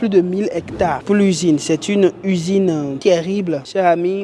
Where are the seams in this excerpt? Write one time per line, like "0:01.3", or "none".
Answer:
none